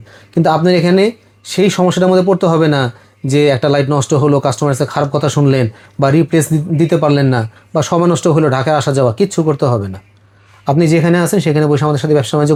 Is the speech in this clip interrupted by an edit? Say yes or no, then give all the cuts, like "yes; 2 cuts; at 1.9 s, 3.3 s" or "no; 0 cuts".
no; 0 cuts